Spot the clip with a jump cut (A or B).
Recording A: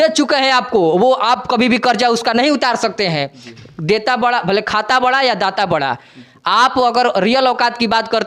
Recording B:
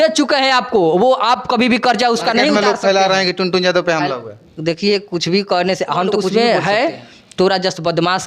B